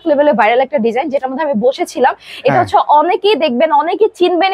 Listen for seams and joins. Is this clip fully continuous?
yes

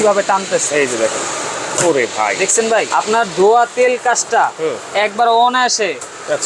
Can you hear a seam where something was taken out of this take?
yes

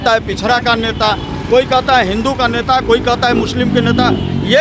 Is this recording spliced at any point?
no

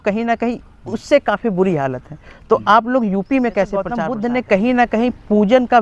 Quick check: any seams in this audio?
yes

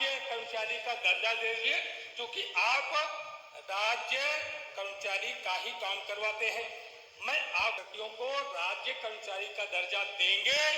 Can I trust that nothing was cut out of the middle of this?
no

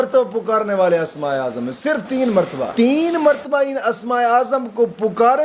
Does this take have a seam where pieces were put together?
yes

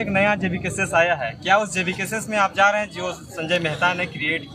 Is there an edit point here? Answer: no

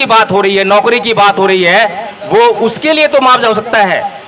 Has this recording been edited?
no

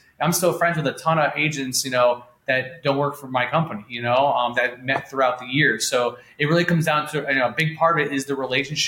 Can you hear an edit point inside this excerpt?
no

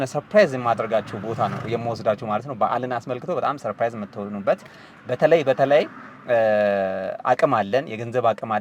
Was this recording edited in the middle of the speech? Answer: no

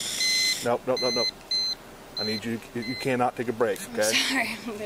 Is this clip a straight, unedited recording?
yes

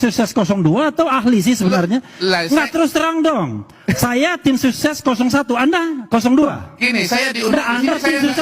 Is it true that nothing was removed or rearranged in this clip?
yes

